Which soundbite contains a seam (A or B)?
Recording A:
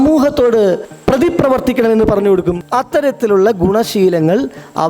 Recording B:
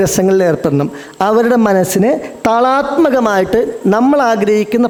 A